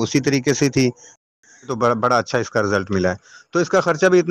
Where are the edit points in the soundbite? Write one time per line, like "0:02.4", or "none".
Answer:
0:01.7